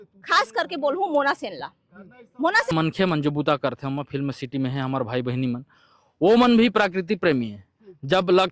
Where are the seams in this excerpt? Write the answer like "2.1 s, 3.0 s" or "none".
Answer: 2.7 s